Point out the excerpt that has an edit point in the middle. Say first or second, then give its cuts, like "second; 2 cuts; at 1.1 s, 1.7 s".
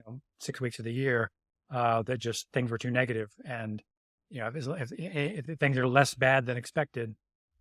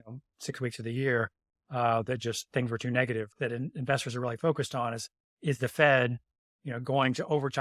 second; 1 cut; at 3.3 s